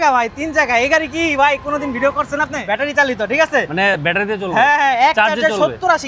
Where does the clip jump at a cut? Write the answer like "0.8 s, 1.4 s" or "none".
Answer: 2.6 s

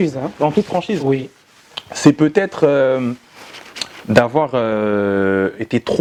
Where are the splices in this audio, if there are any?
none

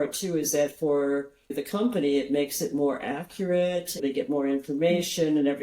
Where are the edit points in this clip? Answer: 1.5 s, 4.0 s

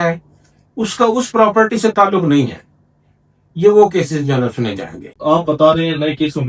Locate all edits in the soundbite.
5.1 s

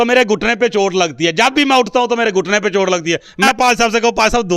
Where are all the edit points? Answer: 3.5 s

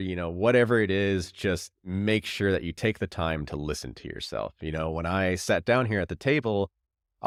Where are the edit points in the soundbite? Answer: none

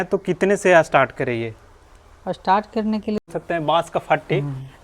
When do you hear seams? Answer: 3.3 s

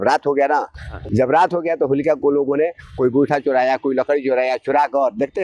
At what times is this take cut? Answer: 0.9 s

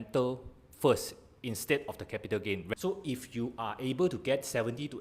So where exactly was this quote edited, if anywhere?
2.7 s

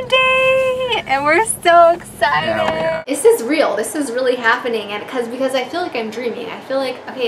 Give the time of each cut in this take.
3.0 s

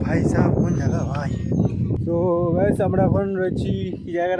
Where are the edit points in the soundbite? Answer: 2.0 s

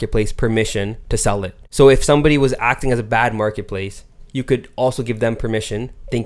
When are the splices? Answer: 1.6 s

